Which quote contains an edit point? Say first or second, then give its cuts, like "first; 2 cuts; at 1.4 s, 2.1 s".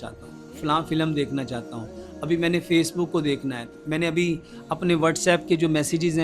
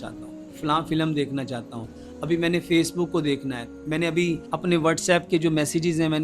second; 1 cut; at 4.4 s